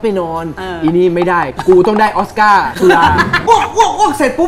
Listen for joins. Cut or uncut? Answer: cut